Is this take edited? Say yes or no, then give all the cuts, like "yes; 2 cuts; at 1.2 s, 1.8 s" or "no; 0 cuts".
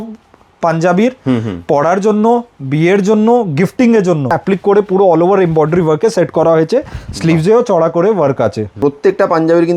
yes; 2 cuts; at 4.4 s, 8.8 s